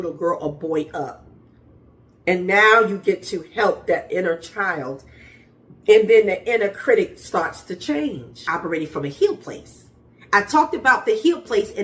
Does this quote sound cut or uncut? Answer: cut